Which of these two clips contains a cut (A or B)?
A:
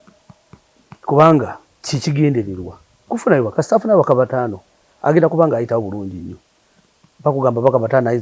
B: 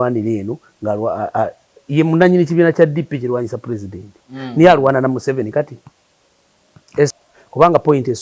B